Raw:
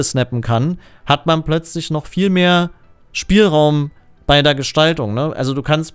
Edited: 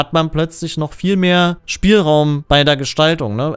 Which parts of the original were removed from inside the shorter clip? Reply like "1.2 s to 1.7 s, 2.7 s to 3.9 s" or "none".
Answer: 2.8 s to 3.1 s, 3.9 s to 4.2 s